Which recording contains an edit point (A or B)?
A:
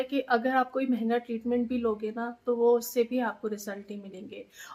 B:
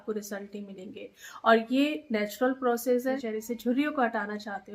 B